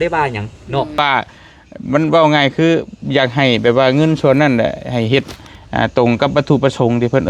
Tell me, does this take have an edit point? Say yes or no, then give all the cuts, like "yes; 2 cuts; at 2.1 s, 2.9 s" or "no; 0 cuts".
yes; 1 cut; at 1.0 s